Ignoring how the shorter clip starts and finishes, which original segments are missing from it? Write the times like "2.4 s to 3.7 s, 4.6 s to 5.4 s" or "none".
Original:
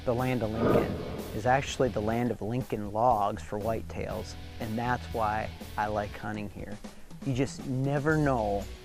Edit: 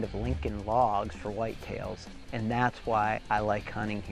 5.5 s to 5.7 s